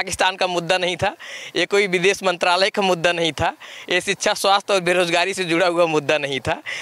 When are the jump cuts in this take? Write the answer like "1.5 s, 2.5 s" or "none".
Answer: none